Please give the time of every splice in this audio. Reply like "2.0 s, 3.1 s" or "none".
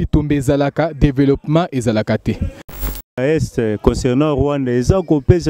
3.1 s